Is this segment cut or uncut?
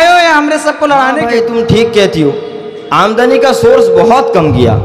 cut